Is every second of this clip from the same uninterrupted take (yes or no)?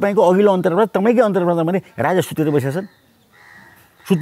yes